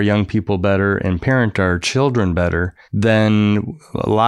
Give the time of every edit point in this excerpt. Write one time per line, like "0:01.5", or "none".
0:02.8

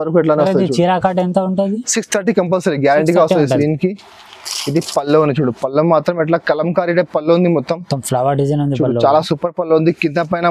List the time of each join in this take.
0:03.6

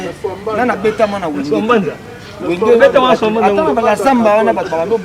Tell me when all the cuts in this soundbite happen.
none

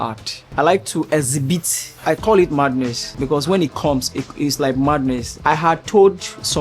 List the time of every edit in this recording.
0:05.3

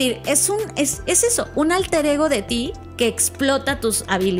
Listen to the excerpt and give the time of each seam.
none

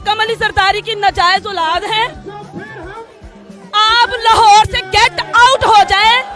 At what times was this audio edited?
none

